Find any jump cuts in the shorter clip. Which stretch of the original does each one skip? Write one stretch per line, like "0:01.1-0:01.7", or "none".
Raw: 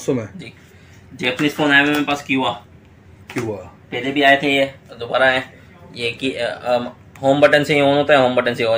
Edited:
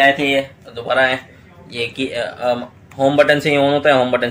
none